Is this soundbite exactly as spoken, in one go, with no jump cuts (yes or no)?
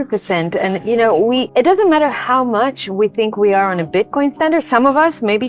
no